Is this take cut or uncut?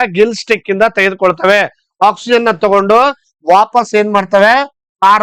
uncut